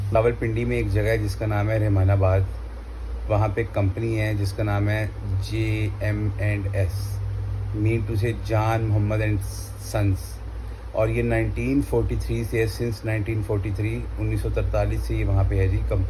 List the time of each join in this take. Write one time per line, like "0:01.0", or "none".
none